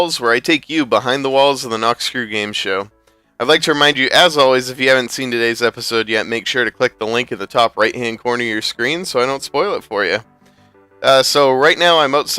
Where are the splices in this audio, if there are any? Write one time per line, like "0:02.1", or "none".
0:03.0